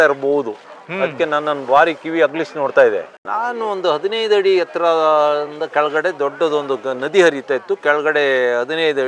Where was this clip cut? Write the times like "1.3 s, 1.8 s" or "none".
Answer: 3.1 s

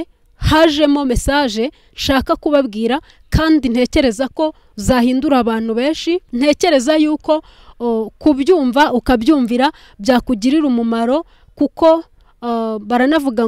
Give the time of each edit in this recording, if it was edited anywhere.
6.3 s

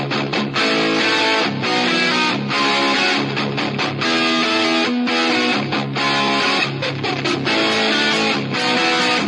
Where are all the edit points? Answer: 7.3 s

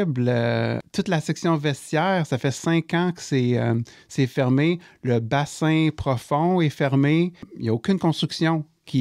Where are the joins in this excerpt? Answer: 0.8 s, 7.5 s

